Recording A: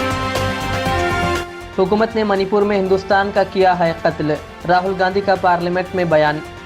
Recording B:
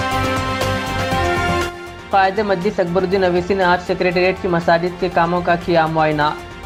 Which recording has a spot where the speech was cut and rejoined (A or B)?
A